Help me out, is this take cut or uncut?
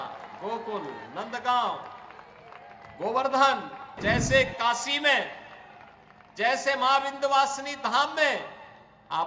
cut